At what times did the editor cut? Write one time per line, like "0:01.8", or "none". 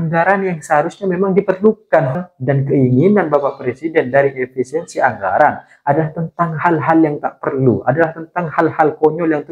0:02.3

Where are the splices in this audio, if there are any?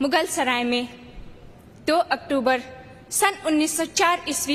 none

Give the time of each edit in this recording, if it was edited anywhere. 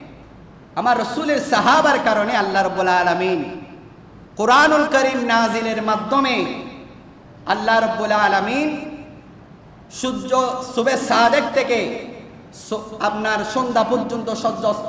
none

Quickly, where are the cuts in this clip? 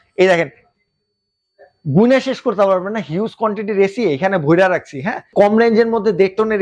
0:05.3

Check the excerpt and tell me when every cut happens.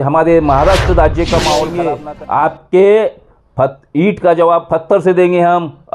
0:01.9

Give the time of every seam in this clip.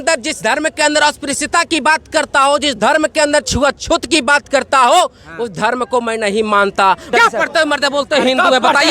0:07.1

